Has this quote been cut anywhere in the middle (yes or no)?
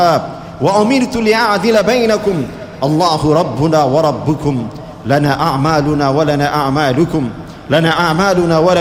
no